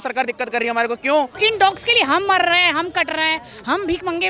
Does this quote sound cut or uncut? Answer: cut